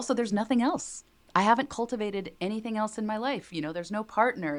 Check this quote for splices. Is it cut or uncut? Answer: uncut